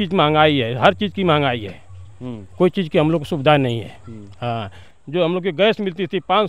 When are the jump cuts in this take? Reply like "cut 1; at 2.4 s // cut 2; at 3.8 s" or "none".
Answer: none